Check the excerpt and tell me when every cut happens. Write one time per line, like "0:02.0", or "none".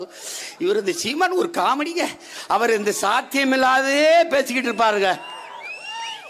none